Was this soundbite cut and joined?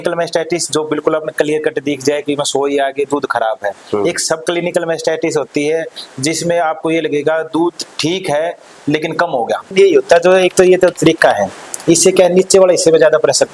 yes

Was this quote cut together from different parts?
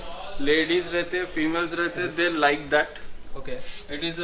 no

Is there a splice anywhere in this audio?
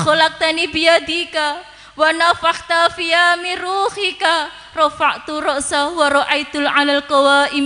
no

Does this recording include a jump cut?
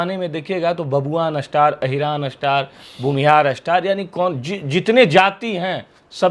no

